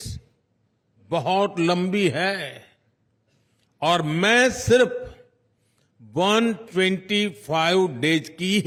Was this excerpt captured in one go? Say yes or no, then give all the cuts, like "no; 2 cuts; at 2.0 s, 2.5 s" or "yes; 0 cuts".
yes; 0 cuts